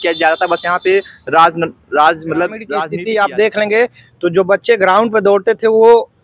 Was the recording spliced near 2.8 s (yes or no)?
yes